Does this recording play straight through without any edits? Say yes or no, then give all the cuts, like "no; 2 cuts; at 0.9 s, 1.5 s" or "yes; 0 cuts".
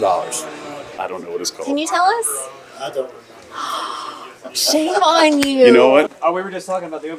no; 2 cuts; at 0.9 s, 6.1 s